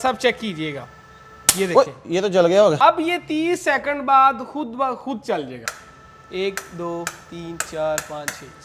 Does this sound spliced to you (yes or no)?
yes